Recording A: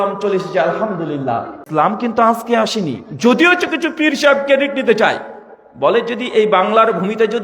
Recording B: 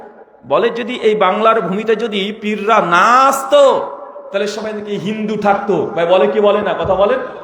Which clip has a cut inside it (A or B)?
A